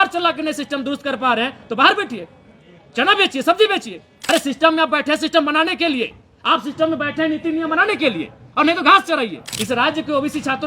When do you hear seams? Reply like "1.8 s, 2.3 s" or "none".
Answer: 4.1 s, 9.5 s